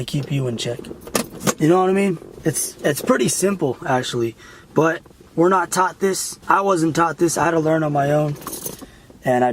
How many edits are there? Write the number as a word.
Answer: two